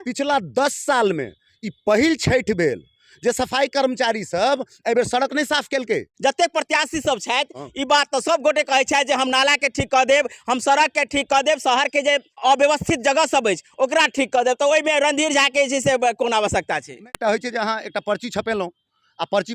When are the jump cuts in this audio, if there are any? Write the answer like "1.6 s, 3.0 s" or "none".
6.1 s, 12.4 s, 17.1 s